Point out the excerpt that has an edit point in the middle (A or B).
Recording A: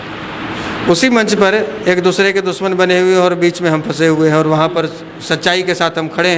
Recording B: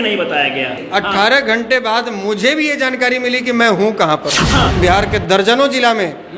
B